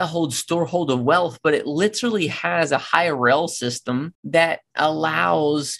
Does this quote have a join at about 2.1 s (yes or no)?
no